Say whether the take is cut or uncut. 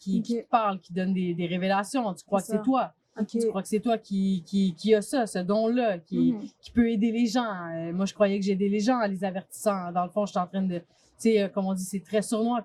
uncut